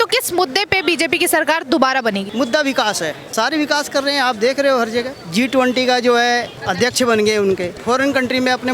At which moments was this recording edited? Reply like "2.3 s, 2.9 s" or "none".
2.3 s, 3.2 s, 5.2 s, 6.6 s, 7.7 s